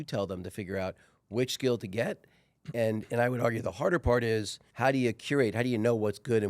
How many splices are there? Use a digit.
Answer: 1